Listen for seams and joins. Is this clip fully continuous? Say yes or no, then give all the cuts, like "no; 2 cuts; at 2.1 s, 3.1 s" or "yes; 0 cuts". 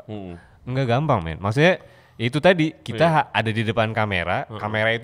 yes; 0 cuts